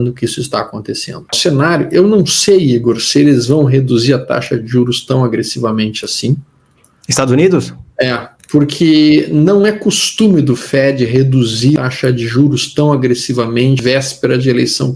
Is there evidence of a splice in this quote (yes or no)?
yes